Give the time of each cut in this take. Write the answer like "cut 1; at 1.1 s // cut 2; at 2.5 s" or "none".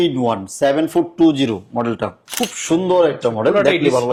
none